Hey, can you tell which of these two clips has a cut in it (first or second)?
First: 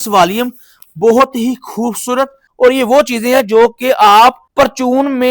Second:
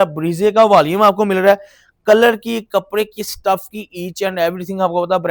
first